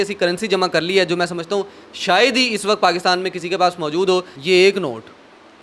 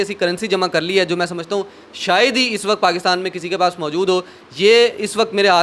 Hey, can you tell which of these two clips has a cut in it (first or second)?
first